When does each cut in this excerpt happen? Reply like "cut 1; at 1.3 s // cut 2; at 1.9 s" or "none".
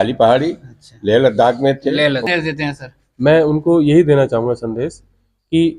cut 1; at 2.3 s

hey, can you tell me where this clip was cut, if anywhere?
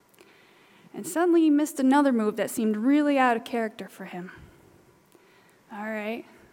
none

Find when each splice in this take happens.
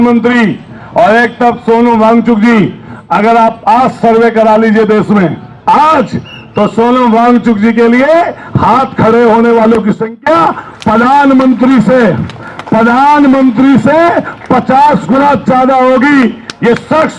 none

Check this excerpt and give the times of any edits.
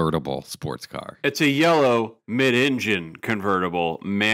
cut 1; at 1.2 s

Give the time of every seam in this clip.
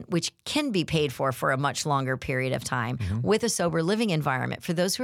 none

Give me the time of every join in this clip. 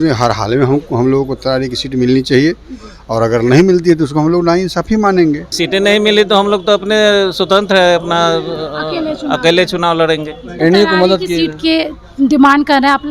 cut 1; at 5.5 s // cut 2; at 10.4 s

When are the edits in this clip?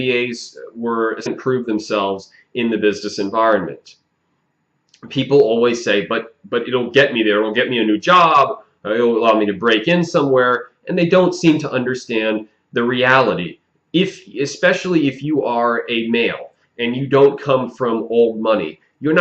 none

